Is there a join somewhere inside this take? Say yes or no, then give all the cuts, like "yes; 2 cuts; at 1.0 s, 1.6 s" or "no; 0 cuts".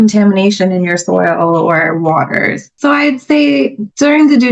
yes; 1 cut; at 2.8 s